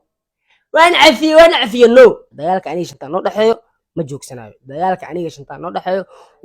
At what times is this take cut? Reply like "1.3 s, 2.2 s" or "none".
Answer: 2.3 s